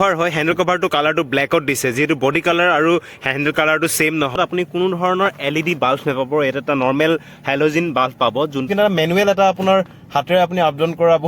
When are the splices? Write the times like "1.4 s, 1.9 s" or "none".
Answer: 4.4 s, 8.7 s